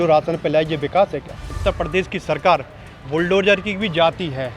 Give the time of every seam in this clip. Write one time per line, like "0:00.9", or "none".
0:01.5